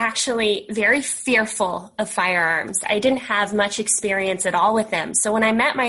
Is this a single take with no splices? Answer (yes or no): yes